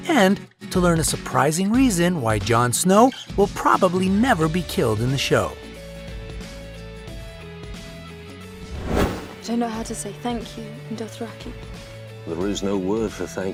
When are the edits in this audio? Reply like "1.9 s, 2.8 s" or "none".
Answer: none

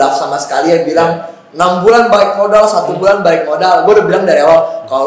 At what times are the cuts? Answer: none

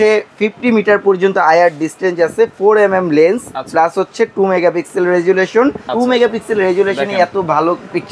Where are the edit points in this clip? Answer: 5.8 s

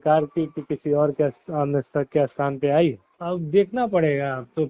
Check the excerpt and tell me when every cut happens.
3.1 s

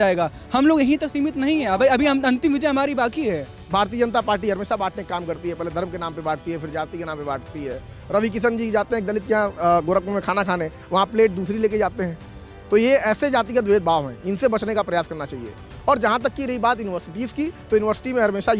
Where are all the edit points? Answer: none

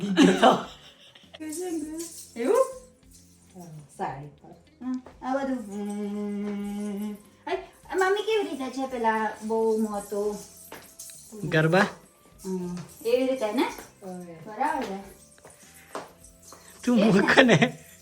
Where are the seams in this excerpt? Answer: 1.4 s

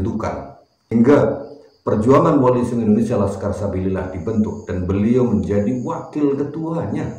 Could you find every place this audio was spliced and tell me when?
0.9 s

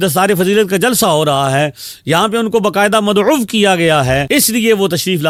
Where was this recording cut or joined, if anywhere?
none

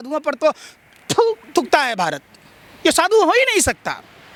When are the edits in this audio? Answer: none

